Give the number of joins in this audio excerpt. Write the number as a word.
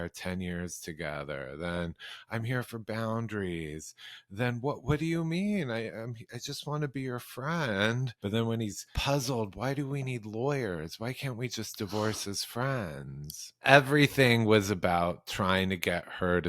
three